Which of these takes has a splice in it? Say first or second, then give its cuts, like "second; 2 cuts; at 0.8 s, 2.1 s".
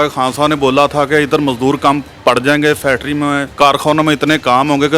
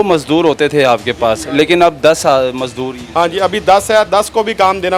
first; 2 cuts; at 2.1 s, 3.5 s